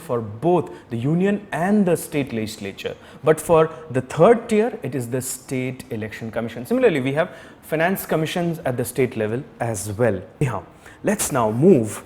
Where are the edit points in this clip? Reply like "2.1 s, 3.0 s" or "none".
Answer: 10.4 s